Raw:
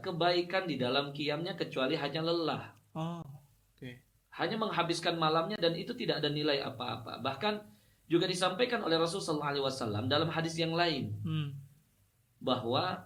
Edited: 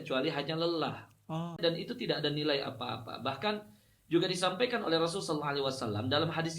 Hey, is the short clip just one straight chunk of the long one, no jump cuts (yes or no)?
no